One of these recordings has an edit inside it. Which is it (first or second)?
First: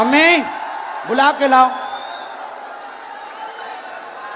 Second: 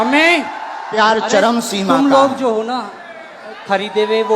second